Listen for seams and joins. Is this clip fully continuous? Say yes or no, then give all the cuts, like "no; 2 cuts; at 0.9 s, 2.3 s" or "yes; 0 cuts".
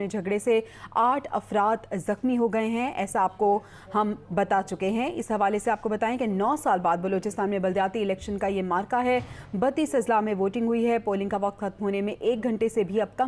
yes; 0 cuts